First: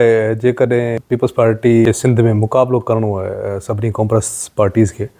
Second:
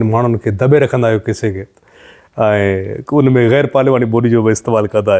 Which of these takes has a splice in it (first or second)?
first